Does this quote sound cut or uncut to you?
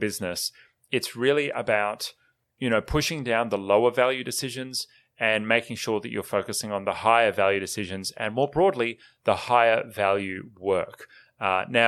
uncut